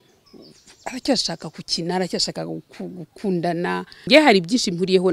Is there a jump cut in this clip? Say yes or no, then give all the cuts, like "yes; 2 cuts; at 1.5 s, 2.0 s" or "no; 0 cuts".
yes; 1 cut; at 4.1 s